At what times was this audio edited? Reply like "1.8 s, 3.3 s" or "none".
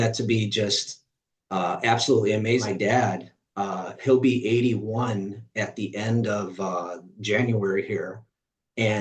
2.6 s